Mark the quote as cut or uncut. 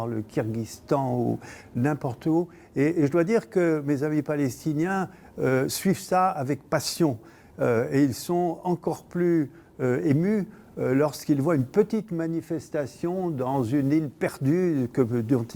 uncut